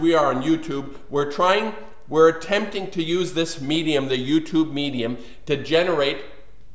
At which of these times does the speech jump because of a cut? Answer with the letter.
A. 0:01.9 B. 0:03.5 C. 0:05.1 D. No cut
A